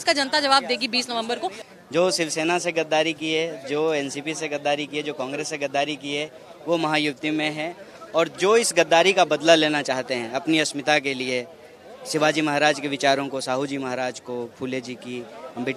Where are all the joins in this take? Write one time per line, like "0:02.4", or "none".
0:01.6